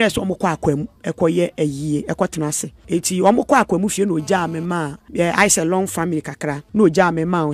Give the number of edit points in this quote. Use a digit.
4